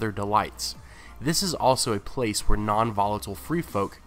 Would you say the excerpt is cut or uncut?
uncut